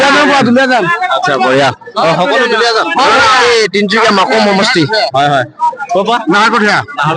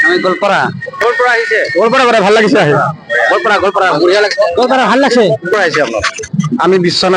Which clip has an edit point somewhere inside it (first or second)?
second